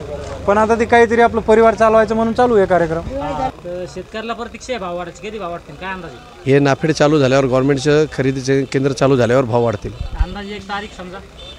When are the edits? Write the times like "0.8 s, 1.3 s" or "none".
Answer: 3.5 s